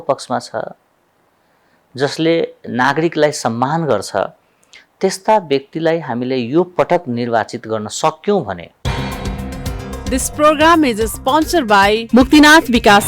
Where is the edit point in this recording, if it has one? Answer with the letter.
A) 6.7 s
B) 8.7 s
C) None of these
B